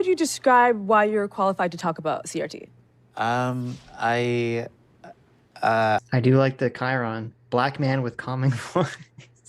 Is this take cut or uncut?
uncut